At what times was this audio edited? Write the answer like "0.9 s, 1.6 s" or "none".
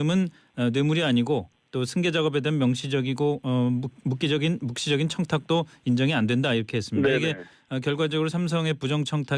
4.2 s